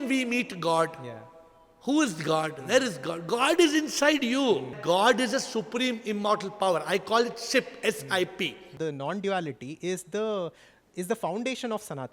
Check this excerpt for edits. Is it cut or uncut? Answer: cut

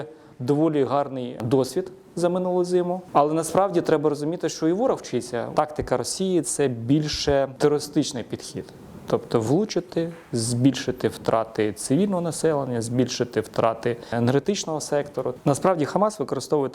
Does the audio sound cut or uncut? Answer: cut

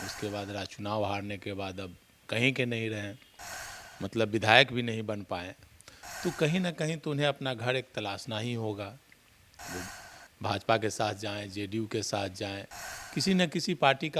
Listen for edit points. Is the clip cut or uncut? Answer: uncut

